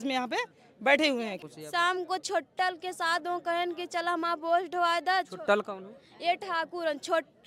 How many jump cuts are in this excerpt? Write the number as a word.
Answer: one